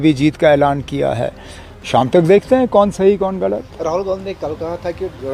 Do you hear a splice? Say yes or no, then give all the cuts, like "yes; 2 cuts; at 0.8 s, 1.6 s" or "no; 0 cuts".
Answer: no; 0 cuts